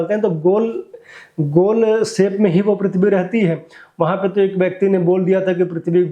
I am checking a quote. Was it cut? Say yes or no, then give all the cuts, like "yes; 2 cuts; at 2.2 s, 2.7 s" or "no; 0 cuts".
no; 0 cuts